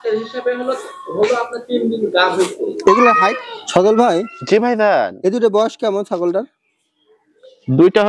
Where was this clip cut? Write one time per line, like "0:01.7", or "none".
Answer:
0:03.4